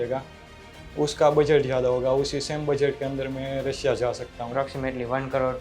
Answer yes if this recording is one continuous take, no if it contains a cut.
no